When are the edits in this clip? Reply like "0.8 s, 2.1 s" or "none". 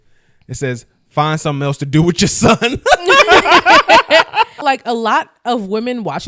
4.6 s